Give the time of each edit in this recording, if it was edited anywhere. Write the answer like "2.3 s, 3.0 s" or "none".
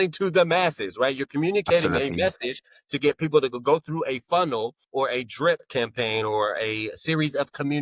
4.8 s